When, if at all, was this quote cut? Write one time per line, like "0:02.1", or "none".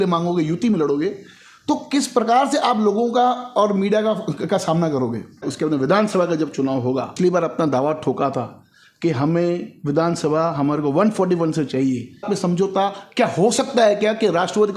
0:05.5
0:07.1
0:12.2